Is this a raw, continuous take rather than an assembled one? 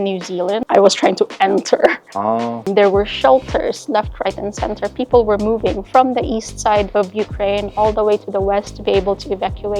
no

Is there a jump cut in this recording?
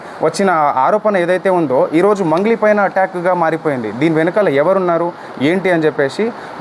no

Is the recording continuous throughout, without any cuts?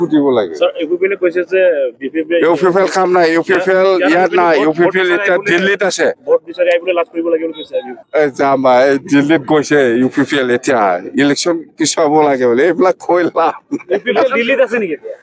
no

